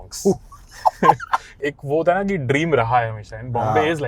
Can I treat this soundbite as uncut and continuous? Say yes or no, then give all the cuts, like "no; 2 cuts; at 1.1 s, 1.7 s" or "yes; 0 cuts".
no; 1 cut; at 1.5 s